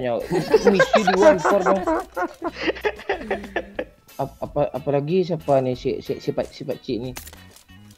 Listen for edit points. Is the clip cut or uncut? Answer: cut